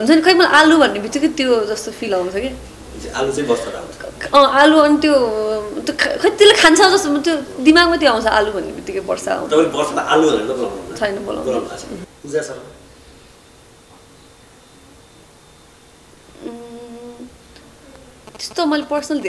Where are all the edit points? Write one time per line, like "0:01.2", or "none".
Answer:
0:12.1